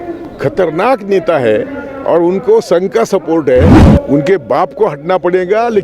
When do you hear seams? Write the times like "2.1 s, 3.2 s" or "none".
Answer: 3.8 s